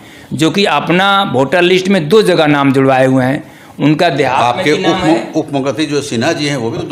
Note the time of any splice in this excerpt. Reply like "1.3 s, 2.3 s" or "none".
none